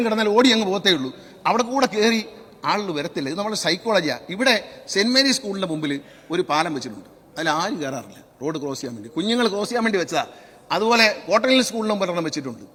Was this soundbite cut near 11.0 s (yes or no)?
no